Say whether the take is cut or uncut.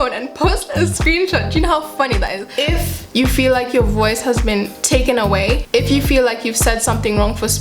cut